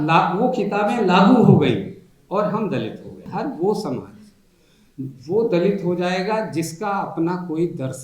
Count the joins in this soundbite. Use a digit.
1